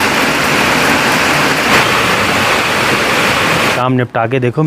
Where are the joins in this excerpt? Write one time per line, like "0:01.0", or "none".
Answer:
0:01.7
0:03.7